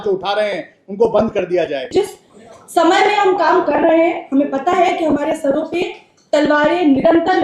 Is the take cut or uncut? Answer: cut